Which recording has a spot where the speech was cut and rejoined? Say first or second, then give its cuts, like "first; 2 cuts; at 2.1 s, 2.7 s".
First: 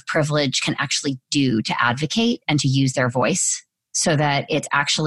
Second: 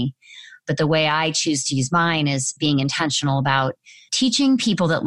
second; 1 cut; at 2.5 s